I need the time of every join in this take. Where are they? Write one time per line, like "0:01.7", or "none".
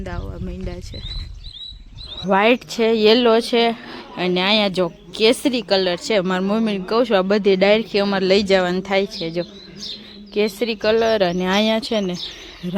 0:02.1